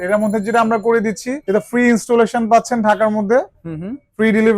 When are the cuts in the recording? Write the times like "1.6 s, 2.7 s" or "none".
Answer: 1.3 s